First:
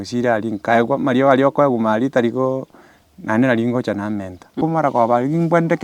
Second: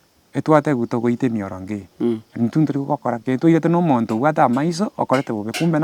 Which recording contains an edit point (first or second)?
first